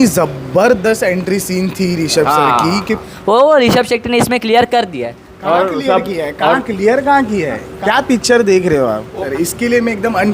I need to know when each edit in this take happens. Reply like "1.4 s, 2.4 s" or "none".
3.1 s, 7.7 s, 9.2 s